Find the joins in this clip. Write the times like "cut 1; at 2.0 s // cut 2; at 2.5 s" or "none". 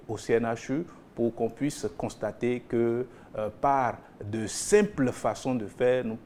none